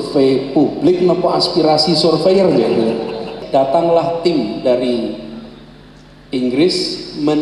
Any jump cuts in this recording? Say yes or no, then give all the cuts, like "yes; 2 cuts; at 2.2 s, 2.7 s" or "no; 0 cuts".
yes; 1 cut; at 3.4 s